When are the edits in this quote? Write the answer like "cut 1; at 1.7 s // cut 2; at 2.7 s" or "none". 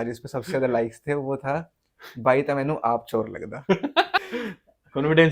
cut 1; at 4.2 s